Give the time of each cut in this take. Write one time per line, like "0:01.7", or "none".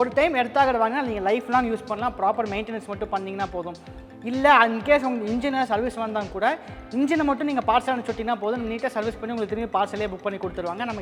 none